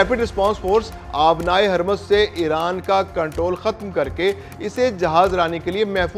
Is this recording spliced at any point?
no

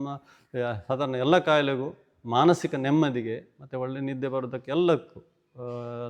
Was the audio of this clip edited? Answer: no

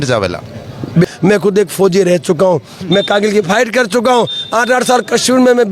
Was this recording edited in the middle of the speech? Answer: yes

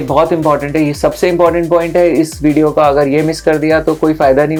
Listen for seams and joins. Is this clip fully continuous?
yes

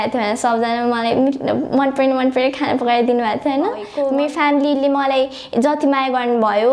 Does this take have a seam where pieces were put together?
yes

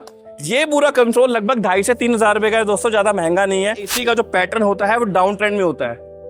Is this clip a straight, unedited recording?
no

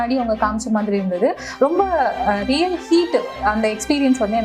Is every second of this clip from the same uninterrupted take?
yes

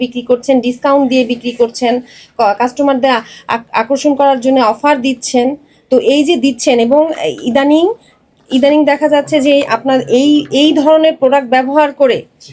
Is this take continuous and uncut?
yes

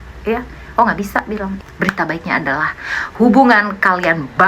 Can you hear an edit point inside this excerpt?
yes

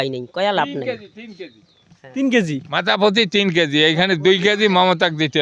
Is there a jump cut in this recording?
no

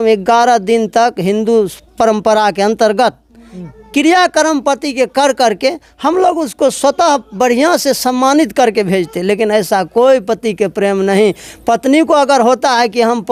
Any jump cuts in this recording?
no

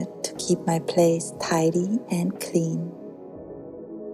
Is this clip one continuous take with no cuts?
yes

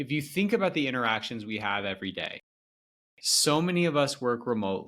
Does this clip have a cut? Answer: no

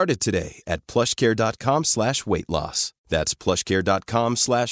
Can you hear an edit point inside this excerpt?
no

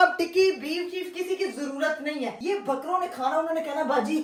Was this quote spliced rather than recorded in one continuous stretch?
no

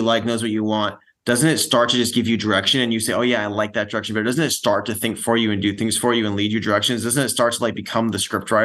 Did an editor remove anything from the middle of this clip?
no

